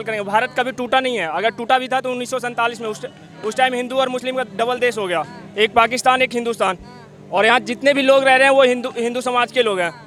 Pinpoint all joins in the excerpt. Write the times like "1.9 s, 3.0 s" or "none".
none